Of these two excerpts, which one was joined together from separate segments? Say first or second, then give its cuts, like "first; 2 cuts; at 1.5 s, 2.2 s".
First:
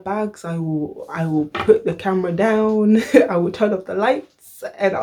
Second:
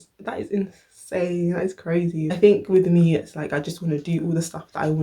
second; 1 cut; at 2.3 s